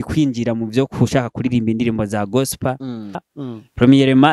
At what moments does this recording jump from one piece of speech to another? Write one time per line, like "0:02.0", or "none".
0:03.3

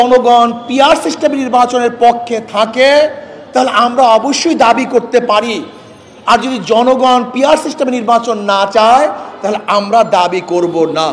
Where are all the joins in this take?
none

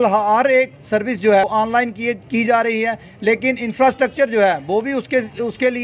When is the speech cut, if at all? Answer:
0:01.5

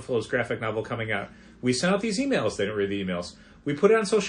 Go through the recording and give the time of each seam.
none

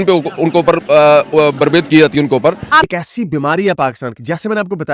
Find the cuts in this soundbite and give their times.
0:02.9

